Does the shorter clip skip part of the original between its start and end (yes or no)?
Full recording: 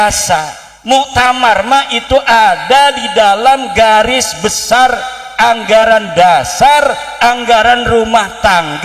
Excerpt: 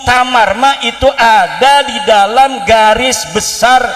no